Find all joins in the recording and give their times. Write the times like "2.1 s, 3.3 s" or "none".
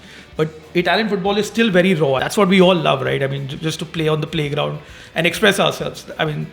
2.2 s

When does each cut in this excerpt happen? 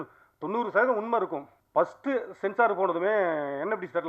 1.6 s

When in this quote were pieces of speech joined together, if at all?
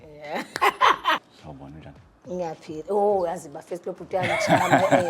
1.2 s

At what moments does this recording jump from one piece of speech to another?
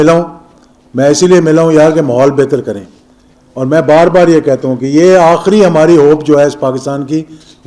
none

